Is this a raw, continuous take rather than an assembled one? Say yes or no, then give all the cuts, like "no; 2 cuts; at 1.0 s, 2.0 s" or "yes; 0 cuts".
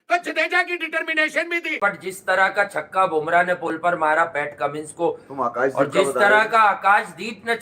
no; 1 cut; at 1.8 s